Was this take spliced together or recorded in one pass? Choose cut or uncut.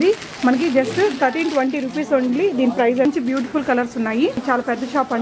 cut